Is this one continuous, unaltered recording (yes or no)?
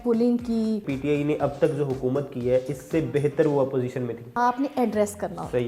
no